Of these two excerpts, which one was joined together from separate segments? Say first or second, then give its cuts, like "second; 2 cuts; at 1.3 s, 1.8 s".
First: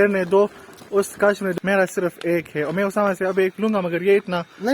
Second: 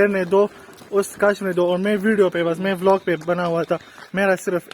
first; 1 cut; at 1.5 s